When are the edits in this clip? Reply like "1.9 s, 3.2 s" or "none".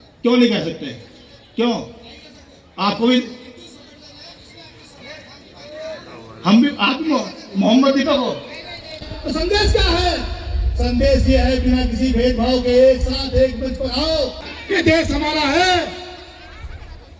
9.0 s, 14.5 s